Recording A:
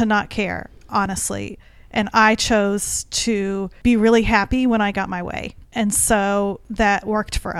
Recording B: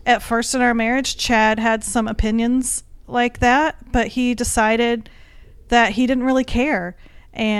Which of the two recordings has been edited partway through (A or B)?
A